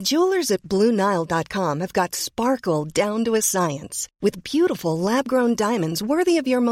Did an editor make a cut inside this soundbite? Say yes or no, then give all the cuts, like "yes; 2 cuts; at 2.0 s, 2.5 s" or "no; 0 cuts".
no; 0 cuts